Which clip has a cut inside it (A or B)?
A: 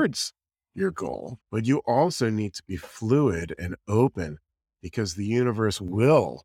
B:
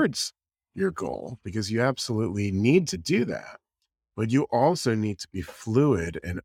A